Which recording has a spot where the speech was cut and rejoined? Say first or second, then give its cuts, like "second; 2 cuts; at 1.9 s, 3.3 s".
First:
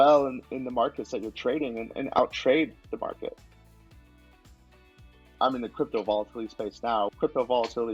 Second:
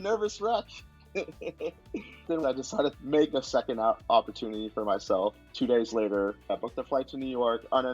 second; 1 cut; at 2.2 s